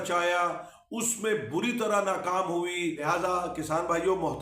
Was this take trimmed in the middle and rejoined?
yes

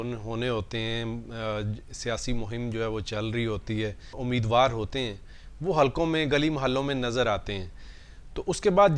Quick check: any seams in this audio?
yes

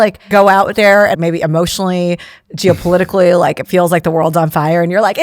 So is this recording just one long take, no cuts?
no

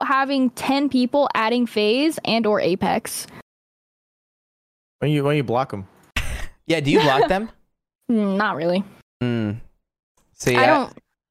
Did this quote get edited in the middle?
no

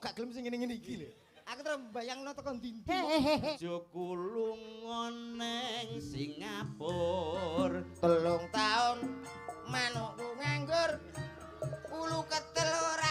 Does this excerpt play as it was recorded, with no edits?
no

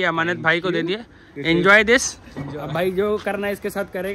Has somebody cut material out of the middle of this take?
no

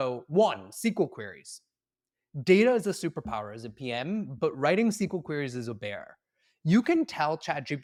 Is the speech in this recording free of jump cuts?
yes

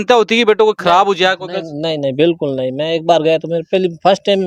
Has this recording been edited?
no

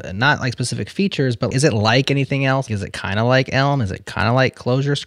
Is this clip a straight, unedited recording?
no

